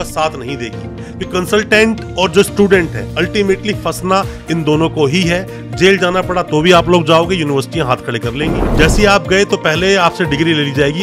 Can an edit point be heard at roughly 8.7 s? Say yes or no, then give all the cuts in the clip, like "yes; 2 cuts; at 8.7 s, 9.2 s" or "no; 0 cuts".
yes; 1 cut; at 8.7 s